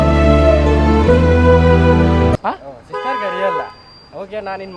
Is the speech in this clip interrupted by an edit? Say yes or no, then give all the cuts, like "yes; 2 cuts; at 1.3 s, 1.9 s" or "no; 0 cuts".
yes; 1 cut; at 2.4 s